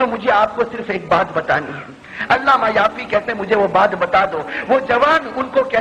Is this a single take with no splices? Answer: yes; 0 cuts

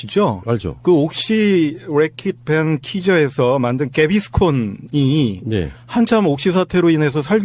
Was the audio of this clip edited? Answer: yes; 1 cut; at 3.3 s

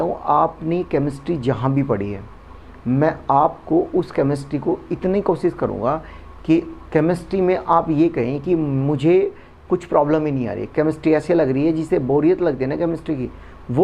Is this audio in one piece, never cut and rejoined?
yes; 0 cuts

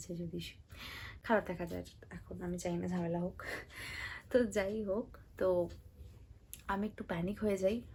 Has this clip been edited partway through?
no; 0 cuts

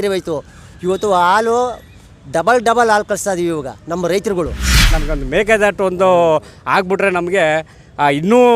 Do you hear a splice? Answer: yes; 1 cut; at 5.0 s

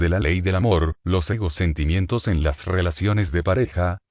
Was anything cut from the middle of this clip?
yes; 1 cut; at 0.9 s

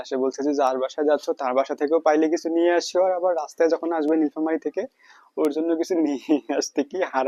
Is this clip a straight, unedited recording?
yes; 0 cuts

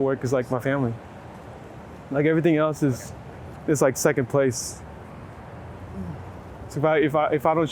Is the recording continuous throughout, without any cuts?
yes; 0 cuts

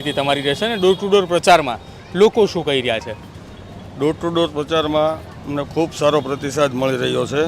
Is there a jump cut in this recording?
no; 0 cuts

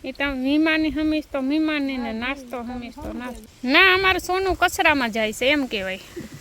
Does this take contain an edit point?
yes; 1 cut; at 3.5 s

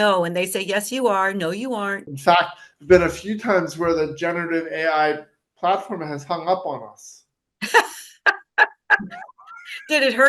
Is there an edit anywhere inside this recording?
yes; 1 cut; at 2.1 s

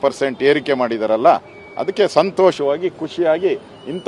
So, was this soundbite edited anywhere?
no; 0 cuts

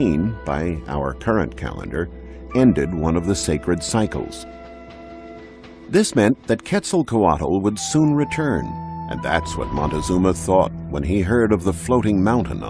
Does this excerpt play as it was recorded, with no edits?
yes; 0 cuts

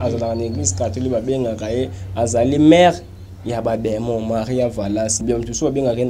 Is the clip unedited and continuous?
no; 1 cut; at 5.2 s

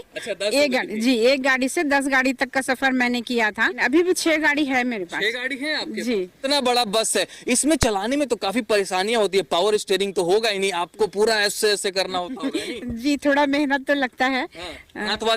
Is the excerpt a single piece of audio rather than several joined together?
no; 2 cuts; at 3.8 s, 6.4 s

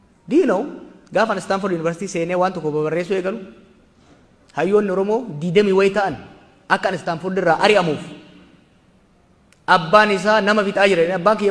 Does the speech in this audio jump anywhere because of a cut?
no; 0 cuts

